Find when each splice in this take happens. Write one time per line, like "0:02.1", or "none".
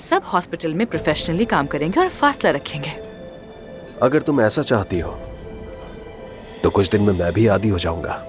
none